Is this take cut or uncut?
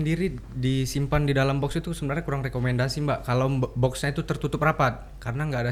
uncut